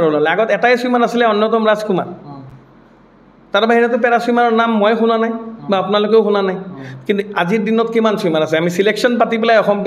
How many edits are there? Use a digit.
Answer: 0